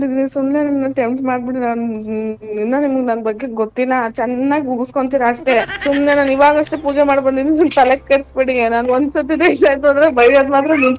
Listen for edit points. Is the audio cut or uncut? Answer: uncut